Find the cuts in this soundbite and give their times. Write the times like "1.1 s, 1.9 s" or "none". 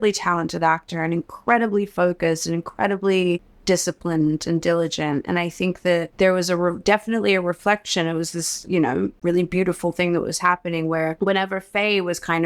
3.5 s, 6.1 s, 9.2 s, 11.2 s